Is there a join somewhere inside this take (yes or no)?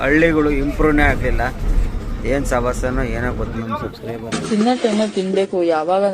yes